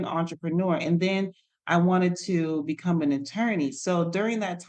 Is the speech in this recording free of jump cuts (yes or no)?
yes